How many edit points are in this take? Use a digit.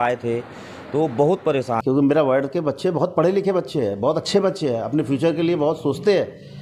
1